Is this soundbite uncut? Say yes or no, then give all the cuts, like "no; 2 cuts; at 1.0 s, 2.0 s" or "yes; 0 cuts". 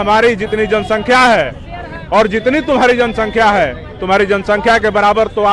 yes; 0 cuts